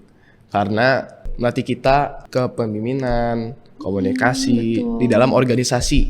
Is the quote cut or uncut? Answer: cut